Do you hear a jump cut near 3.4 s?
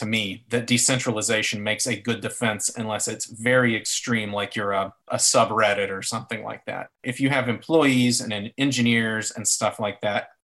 no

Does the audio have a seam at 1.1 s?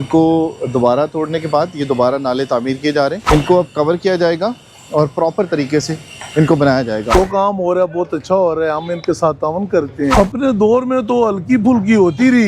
no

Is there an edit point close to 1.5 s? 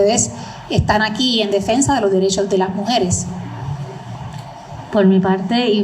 no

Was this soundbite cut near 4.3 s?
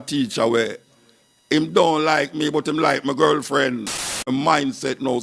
yes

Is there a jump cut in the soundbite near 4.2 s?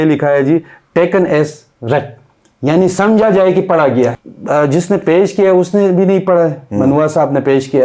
yes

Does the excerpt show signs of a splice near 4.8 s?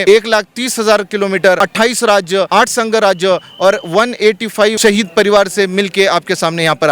yes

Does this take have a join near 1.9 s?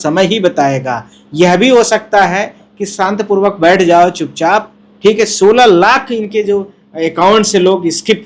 no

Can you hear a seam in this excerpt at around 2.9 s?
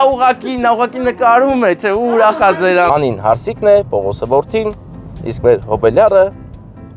yes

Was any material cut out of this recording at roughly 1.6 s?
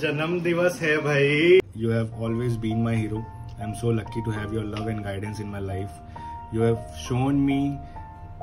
yes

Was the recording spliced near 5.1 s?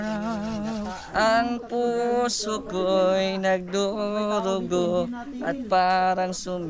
no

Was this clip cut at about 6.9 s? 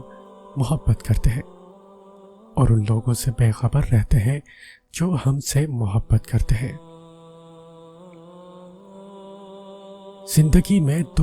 yes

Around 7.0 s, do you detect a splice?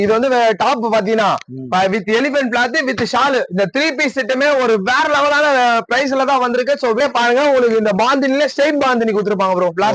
yes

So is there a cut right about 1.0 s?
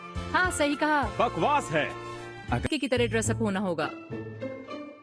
no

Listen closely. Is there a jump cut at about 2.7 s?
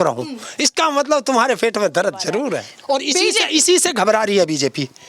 yes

